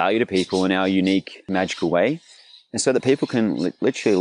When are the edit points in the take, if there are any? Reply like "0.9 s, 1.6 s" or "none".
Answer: 1.5 s